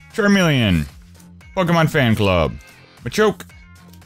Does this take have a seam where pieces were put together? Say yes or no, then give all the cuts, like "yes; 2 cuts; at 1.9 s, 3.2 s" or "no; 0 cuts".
yes; 1 cut; at 3.1 s